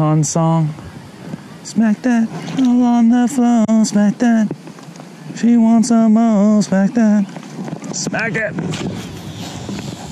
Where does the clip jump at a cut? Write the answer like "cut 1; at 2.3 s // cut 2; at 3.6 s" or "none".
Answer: none